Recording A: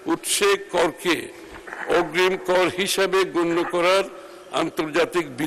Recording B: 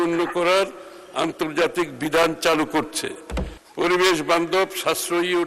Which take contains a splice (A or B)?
B